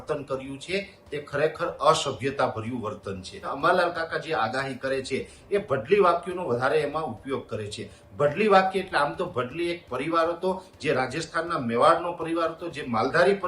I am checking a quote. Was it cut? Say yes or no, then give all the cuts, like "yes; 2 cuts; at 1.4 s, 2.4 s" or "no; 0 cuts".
yes; 1 cut; at 3.5 s